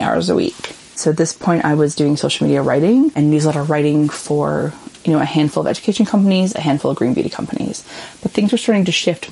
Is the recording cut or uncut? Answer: cut